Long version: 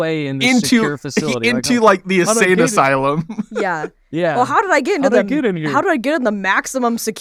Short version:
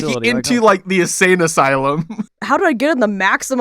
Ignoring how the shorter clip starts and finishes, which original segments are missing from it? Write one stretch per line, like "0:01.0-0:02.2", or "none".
0:03.6-0:05.6